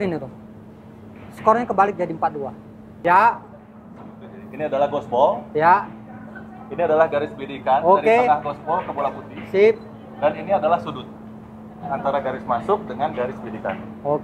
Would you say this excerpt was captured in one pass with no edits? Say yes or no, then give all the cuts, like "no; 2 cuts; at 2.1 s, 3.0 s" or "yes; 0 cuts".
no; 1 cut; at 3.0 s